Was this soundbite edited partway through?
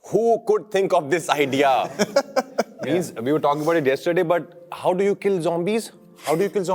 no; 0 cuts

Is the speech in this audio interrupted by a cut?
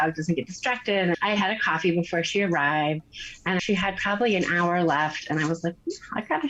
yes; 2 cuts; at 1.2 s, 3.6 s

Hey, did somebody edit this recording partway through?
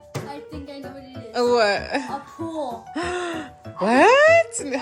no; 0 cuts

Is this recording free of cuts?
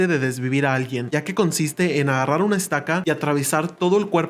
no; 1 cut; at 1.1 s

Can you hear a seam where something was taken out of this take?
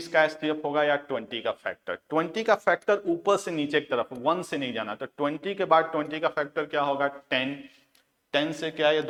no; 0 cuts

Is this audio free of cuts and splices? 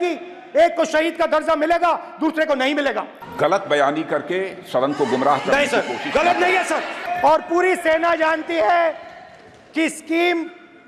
no; 2 cuts; at 3.2 s, 7.0 s

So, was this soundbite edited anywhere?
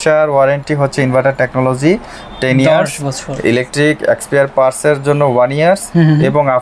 no; 0 cuts

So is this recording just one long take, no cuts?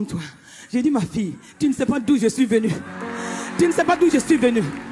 yes; 0 cuts

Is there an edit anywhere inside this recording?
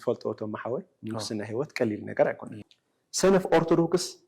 yes; 1 cut; at 2.6 s

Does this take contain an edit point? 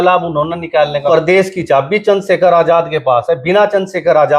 yes; 1 cut; at 1.1 s

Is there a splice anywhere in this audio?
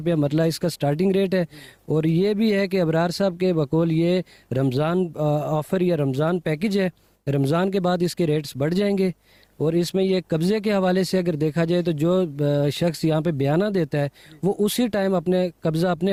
no; 0 cuts

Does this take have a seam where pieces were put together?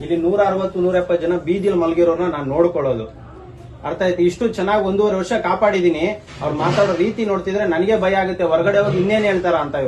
no; 0 cuts

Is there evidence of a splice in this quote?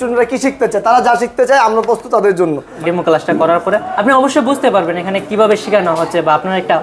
yes; 2 cuts; at 2.6 s, 3.9 s

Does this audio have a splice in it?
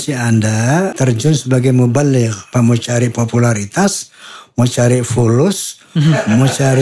yes; 2 cuts; at 0.9 s, 2.4 s

